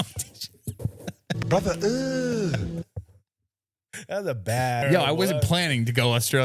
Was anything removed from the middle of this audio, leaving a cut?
yes; 1 cut; at 4.8 s

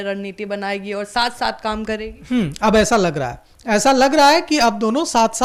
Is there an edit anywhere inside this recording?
no; 0 cuts

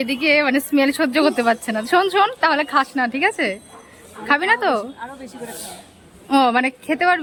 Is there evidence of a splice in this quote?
no; 0 cuts

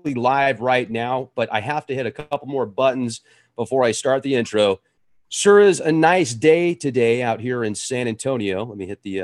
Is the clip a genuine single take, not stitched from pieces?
yes; 0 cuts

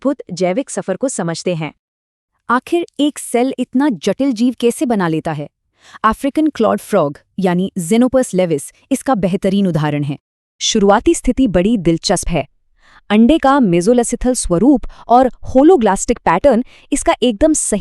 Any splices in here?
yes; 1 cut; at 9.3 s

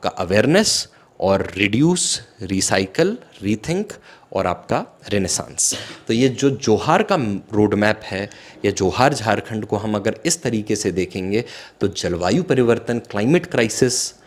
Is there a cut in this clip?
no; 0 cuts

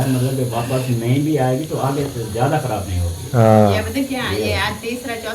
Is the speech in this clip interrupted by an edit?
no; 0 cuts

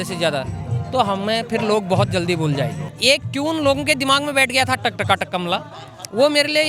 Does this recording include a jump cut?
yes; 1 cut; at 2.8 s

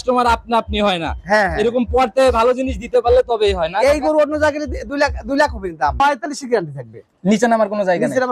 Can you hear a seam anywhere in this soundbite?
yes; 1 cut; at 6.0 s

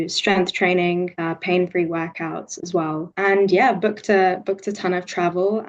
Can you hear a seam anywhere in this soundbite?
yes; 2 cuts; at 1.1 s, 3.1 s

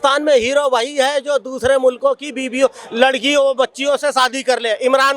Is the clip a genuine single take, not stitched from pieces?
yes; 0 cuts

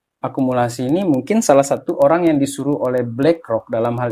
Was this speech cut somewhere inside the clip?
no; 0 cuts

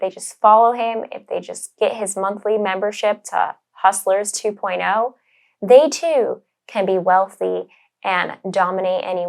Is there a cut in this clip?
no; 0 cuts

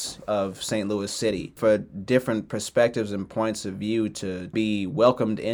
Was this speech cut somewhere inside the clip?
yes; 2 cuts; at 1.5 s, 4.5 s

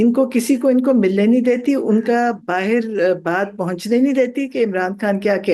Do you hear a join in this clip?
no; 0 cuts

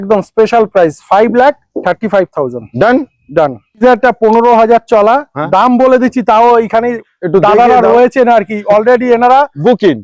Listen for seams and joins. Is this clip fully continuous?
no; 1 cut; at 3.8 s

